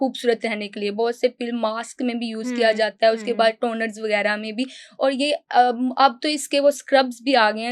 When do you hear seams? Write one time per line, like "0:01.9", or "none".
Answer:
none